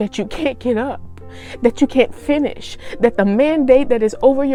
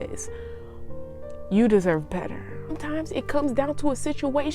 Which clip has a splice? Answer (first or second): second